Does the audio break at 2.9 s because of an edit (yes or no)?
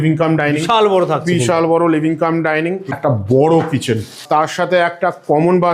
yes